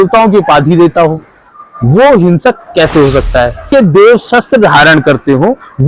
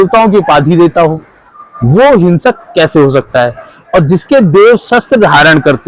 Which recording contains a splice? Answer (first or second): first